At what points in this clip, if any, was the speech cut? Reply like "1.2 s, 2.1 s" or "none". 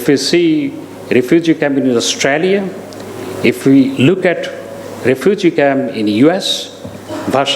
none